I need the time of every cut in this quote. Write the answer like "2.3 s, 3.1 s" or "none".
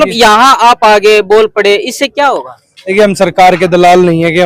none